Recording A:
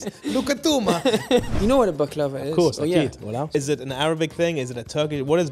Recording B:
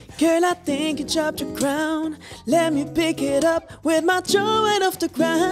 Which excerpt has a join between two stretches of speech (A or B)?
A